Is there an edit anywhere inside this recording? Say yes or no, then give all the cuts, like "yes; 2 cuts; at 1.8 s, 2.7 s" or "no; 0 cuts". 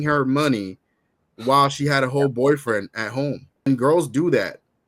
yes; 1 cut; at 3.7 s